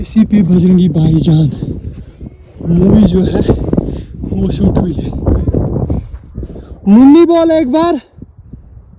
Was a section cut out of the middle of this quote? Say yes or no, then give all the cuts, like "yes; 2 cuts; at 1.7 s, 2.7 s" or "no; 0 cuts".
no; 0 cuts